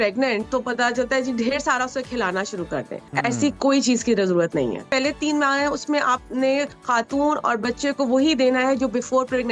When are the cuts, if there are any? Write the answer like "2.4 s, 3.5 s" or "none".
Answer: 3.0 s, 4.9 s, 6.8 s